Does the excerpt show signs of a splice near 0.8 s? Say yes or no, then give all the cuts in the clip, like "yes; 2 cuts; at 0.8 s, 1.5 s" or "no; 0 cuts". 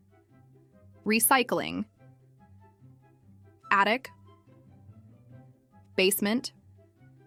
no; 0 cuts